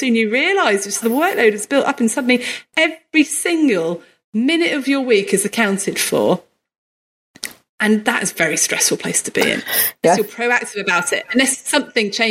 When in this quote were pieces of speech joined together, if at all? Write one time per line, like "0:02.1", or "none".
none